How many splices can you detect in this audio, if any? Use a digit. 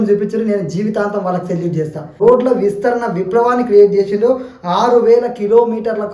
1